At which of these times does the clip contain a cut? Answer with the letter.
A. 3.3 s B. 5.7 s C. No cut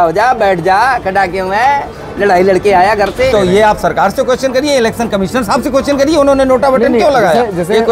A